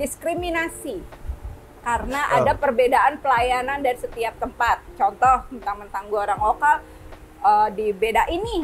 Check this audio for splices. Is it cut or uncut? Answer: uncut